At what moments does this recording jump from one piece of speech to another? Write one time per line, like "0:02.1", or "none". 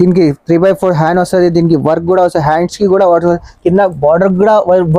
none